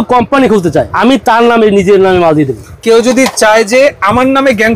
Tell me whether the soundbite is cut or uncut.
cut